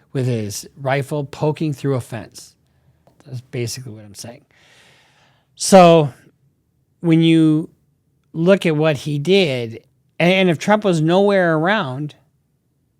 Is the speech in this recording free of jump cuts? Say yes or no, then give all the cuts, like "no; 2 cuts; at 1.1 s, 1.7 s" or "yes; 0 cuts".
no; 1 cut; at 2.9 s